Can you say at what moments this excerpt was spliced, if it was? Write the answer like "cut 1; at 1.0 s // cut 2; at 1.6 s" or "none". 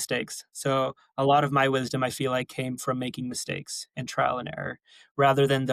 none